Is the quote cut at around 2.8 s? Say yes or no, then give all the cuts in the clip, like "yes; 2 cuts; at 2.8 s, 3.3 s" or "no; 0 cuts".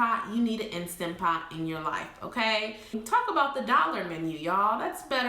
yes; 1 cut; at 2.8 s